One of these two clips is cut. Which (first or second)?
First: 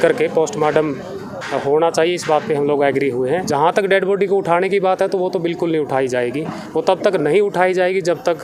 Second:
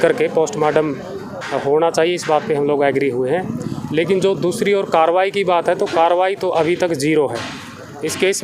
first